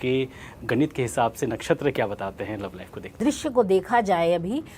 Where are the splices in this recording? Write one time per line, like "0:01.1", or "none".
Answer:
0:03.2